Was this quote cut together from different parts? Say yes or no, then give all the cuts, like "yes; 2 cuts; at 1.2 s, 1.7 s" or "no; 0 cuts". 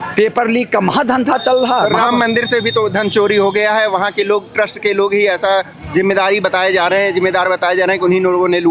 no; 0 cuts